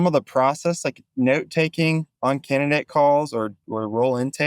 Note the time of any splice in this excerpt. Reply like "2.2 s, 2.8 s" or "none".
2.1 s